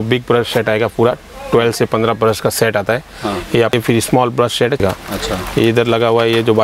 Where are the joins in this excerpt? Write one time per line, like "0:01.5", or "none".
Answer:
0:03.7
0:04.8